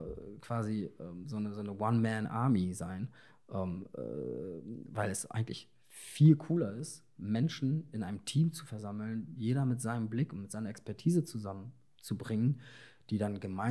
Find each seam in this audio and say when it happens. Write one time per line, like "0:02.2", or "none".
none